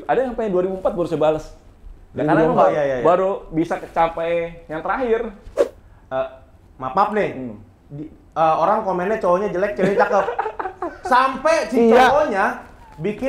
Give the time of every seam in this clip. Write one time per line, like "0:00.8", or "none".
0:05.5